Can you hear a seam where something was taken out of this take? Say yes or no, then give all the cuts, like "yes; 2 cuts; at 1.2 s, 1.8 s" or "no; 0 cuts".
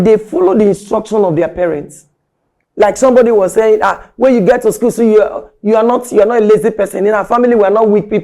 no; 0 cuts